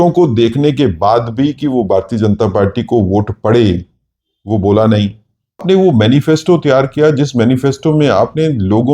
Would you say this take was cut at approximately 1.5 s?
no; 1 cut; at 5.6 s

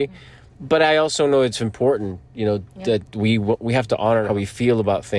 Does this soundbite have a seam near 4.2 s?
yes; 1 cut; at 4.2 s

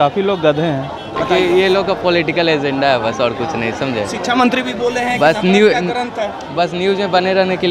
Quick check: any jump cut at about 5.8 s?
no; 1 cut; at 1.1 s

